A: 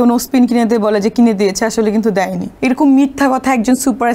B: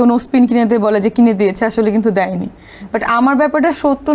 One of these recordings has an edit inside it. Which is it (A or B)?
A